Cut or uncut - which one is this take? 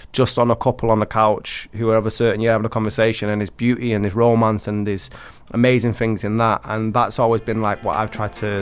uncut